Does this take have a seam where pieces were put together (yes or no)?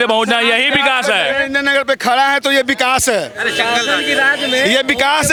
no